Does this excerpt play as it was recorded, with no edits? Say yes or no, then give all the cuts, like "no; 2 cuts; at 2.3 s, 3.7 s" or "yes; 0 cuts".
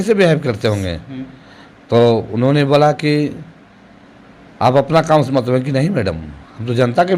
yes; 0 cuts